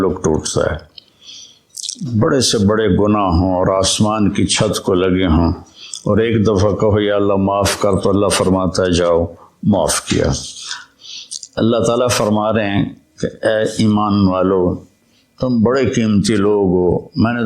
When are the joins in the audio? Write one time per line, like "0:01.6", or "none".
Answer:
0:10.9